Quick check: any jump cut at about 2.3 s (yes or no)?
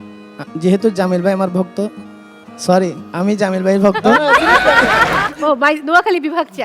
no